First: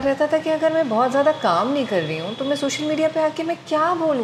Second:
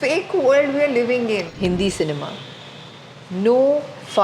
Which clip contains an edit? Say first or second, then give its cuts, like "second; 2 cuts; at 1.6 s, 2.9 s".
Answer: second; 1 cut; at 1.5 s